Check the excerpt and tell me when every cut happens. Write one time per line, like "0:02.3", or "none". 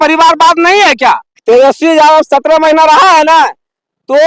0:01.0